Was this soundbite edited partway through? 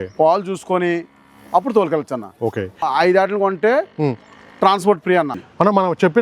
yes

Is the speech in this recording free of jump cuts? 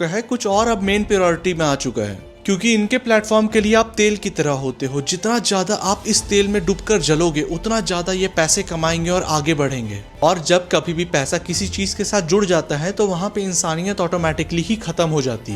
no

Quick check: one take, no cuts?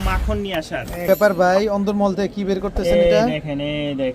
no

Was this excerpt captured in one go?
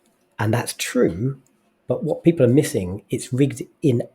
yes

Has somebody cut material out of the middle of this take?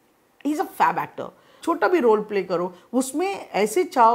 yes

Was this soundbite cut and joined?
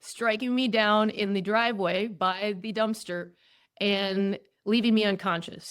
no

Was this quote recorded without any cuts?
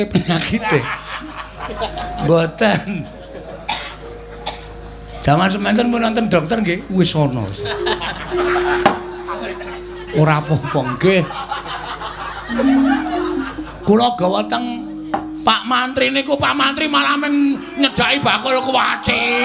no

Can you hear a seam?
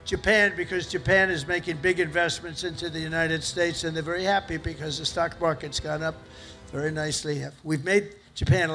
no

